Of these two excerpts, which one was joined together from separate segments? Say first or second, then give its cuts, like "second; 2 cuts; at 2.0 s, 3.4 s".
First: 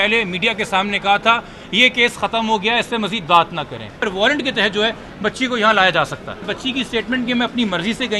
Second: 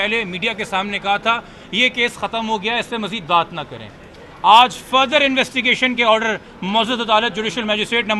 first; 2 cuts; at 4.0 s, 6.4 s